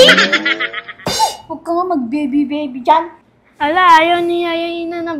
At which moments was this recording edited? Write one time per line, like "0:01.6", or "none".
none